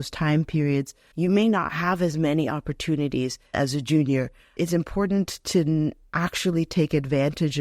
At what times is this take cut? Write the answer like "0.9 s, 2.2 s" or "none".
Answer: 1.0 s, 3.5 s, 4.5 s, 6.0 s